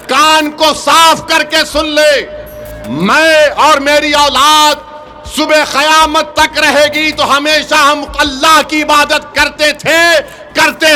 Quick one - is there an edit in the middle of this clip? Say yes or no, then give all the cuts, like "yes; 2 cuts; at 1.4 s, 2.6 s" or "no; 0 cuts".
no; 0 cuts